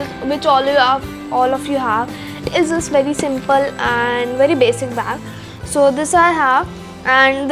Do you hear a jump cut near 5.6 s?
no; 1 cut; at 2.4 s

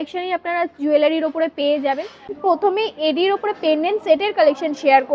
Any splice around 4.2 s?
no; 1 cut; at 2.3 s

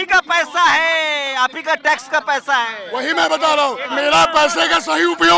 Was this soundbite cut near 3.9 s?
yes; 1 cut; at 3.9 s

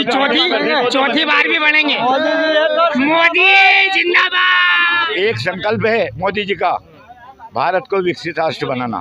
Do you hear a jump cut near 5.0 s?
yes; 1 cut; at 5.0 s

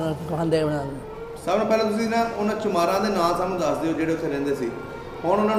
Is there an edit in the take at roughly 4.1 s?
no; 0 cuts

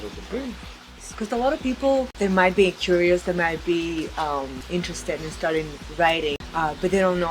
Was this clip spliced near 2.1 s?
yes; 4 cuts; at 1.1 s, 2.1 s, 4.6 s, 6.4 s

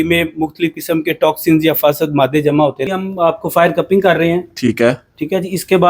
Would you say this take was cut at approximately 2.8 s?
yes; 1 cut; at 2.8 s

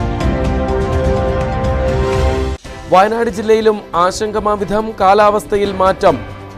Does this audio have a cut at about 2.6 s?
no; 0 cuts

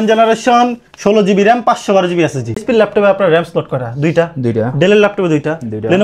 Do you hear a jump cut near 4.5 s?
no; 1 cut; at 2.6 s

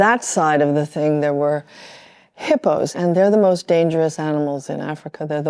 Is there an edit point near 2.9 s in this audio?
yes; 1 cut; at 2.9 s

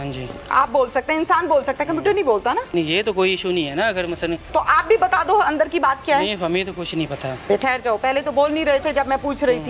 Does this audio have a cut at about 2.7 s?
yes; 3 cuts; at 2.7 s, 4.5 s, 7.5 s

